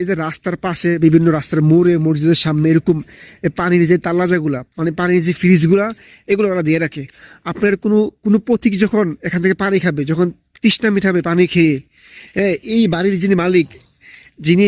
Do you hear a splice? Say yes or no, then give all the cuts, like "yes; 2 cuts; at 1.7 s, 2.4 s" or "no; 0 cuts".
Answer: no; 0 cuts